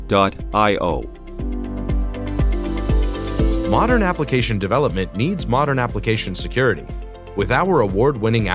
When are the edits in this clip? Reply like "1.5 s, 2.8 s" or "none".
1.2 s, 3.6 s